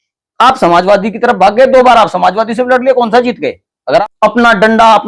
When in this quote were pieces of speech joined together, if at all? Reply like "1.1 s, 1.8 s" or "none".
4.0 s